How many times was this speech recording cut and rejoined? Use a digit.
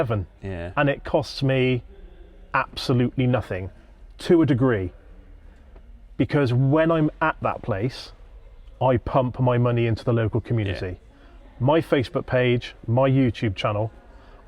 0